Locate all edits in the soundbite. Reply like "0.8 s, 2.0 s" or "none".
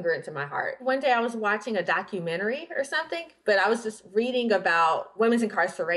0.8 s, 5.1 s